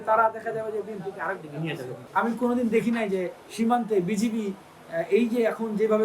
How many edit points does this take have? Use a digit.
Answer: 1